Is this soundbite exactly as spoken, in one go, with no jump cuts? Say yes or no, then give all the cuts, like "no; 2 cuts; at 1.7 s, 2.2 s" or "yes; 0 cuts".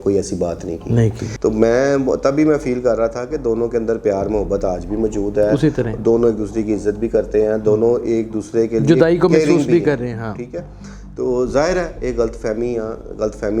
no; 1 cut; at 1.2 s